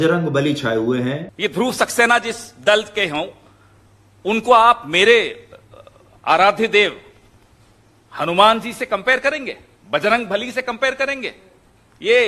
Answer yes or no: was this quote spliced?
yes